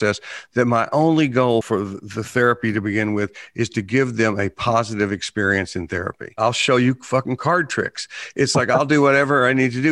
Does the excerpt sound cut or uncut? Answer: cut